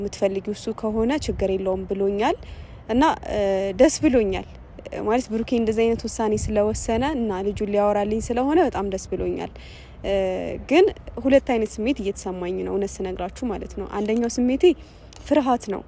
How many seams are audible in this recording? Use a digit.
0